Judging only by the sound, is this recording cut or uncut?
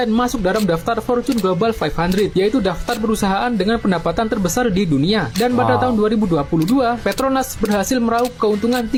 uncut